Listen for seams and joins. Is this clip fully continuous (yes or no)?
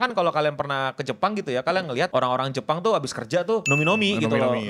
no